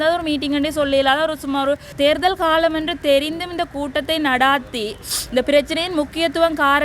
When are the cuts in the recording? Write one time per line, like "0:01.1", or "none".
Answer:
0:01.9

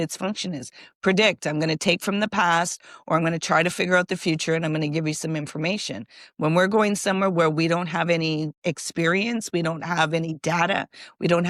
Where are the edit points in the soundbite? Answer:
0:08.5

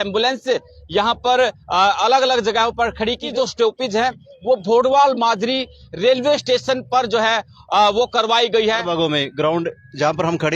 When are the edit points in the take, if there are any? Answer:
0:03.2
0:08.9

